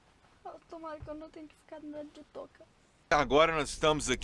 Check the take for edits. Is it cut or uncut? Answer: cut